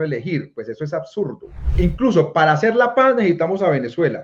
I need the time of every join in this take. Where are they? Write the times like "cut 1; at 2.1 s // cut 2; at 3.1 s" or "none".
cut 1; at 1.6 s